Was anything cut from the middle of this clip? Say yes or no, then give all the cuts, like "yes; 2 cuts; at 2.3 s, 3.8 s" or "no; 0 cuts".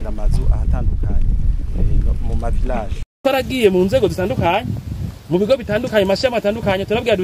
yes; 1 cut; at 3.2 s